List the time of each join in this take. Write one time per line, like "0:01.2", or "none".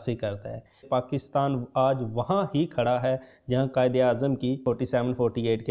0:00.8
0:04.6